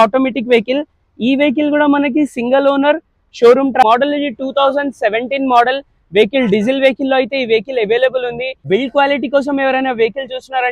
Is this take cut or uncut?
cut